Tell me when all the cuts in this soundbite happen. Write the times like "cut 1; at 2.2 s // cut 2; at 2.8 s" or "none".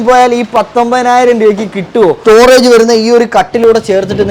cut 1; at 2.2 s